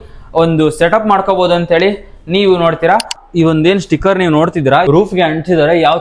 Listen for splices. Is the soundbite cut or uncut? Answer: cut